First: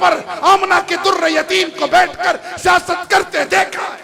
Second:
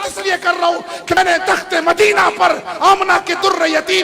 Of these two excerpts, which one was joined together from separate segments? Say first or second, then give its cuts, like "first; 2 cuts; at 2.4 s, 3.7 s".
second; 1 cut; at 1.1 s